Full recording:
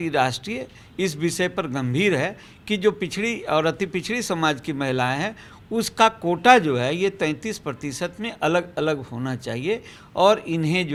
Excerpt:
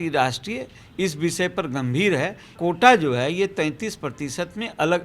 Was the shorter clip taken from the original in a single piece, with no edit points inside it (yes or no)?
no